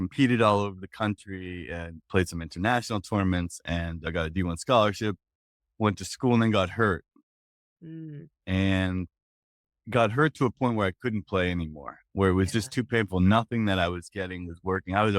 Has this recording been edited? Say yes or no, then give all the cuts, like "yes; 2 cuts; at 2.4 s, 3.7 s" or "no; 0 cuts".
no; 0 cuts